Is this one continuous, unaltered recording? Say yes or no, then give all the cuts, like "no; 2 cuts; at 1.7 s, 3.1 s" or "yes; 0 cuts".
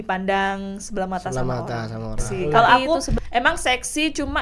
no; 1 cut; at 2.3 s